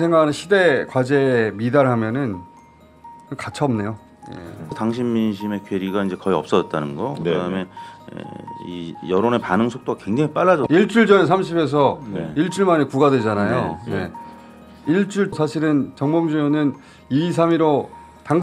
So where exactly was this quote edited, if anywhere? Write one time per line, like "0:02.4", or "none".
0:04.7
0:10.6
0:15.3